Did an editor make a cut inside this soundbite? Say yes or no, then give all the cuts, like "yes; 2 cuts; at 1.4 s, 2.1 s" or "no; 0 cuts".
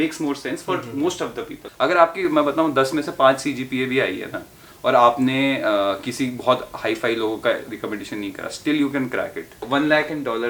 yes; 2 cuts; at 1.6 s, 9.7 s